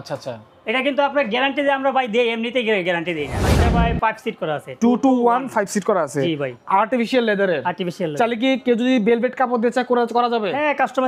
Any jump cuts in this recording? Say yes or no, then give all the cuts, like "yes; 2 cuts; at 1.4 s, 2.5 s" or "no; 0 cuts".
yes; 1 cut; at 3.4 s